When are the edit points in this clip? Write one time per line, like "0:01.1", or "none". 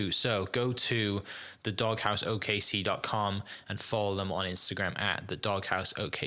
none